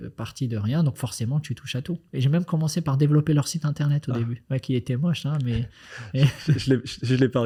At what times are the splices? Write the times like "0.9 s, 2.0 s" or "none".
none